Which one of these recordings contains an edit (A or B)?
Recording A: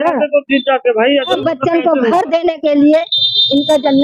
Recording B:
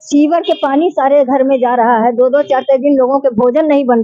A